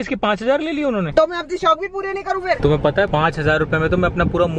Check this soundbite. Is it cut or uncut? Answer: cut